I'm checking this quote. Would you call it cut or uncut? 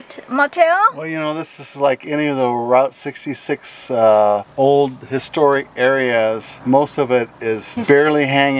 cut